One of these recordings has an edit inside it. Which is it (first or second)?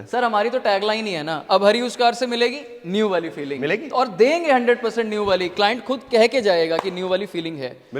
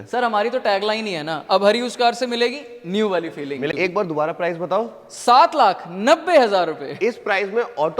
second